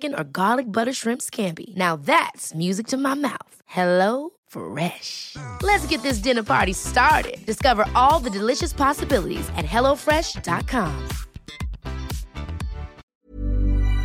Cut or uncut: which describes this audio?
cut